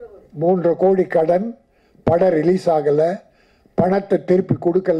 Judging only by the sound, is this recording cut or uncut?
uncut